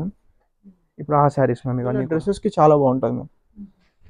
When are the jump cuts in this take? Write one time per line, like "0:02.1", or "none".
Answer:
0:02.2